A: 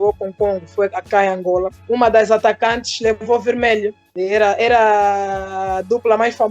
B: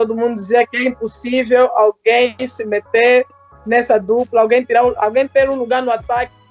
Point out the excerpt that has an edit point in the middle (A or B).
A